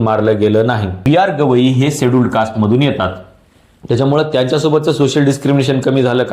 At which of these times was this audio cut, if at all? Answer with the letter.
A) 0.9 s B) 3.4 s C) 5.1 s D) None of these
A